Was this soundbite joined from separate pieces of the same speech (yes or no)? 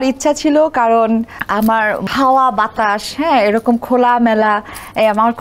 yes